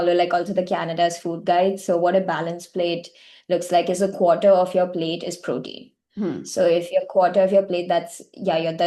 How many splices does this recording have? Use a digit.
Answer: 0